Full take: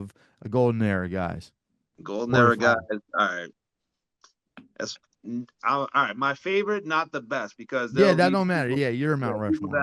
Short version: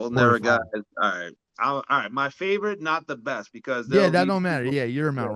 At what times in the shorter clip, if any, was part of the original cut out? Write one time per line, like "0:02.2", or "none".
0:01.5